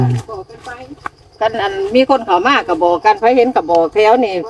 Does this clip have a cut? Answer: no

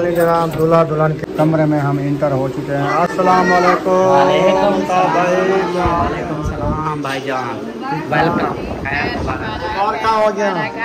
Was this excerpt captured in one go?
no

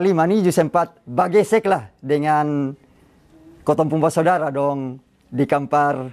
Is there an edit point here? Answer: no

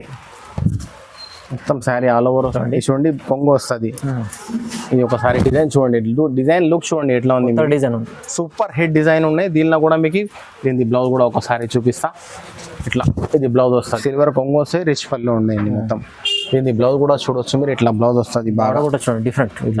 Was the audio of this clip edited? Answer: yes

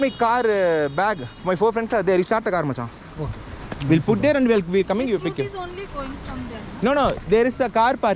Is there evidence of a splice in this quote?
no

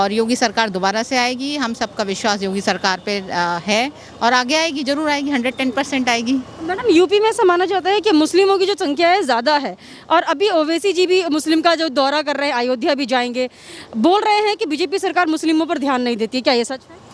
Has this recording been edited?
no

